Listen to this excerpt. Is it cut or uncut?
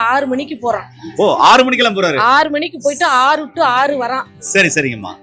uncut